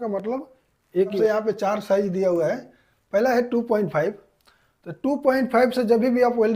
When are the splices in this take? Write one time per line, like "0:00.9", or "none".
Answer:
0:01.2